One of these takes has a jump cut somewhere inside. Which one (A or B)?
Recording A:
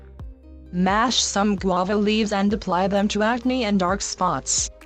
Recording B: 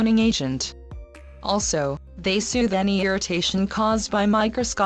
B